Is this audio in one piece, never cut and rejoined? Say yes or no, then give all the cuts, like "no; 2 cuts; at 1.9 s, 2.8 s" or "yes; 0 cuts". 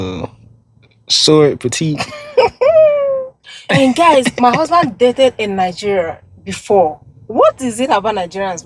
no; 1 cut; at 3.5 s